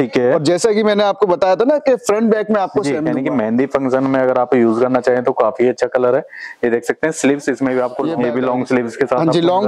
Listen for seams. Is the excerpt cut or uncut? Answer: cut